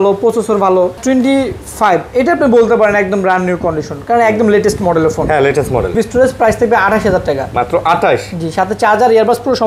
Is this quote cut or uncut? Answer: cut